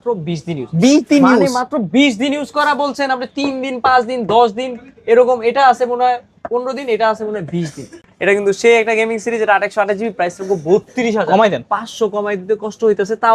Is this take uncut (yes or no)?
no